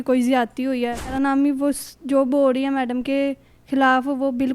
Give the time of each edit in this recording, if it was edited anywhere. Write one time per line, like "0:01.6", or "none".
0:01.1